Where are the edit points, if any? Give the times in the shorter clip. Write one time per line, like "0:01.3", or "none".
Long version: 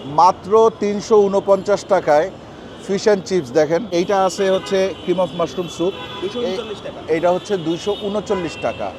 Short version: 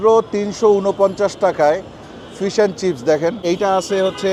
none